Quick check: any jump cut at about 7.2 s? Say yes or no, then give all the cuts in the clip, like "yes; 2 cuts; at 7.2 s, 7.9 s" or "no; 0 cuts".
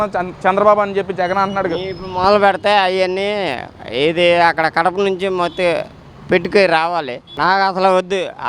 yes; 1 cut; at 7.2 s